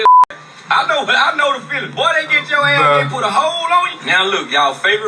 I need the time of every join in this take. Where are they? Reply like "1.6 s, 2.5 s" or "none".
none